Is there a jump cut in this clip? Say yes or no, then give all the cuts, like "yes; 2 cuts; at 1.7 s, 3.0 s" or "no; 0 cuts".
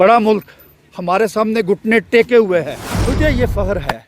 yes; 1 cut; at 2.9 s